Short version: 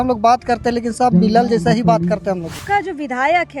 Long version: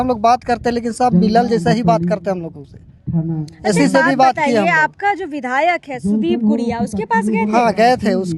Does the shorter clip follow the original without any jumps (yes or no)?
no